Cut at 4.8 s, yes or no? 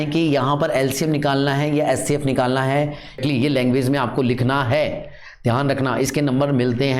no